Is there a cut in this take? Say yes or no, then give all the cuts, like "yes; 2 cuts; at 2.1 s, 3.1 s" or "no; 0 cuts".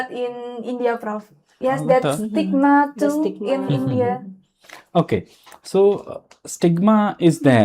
yes; 1 cut; at 1.5 s